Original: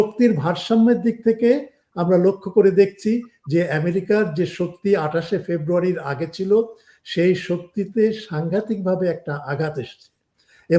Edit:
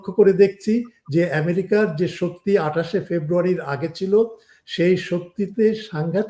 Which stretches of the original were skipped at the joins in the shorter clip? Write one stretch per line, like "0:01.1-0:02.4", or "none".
none